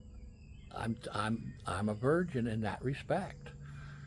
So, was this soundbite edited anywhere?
no; 0 cuts

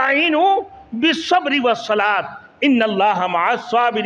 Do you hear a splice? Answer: no; 0 cuts

